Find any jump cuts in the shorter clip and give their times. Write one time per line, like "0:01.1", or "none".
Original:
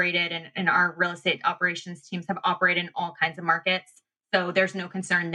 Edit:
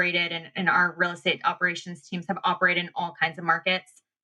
none